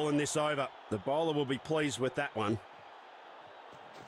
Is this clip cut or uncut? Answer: uncut